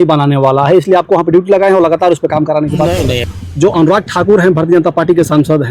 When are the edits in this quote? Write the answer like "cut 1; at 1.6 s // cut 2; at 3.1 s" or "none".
cut 1; at 3.2 s